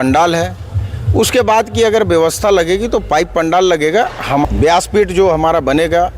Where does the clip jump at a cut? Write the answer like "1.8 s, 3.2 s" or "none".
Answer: 4.4 s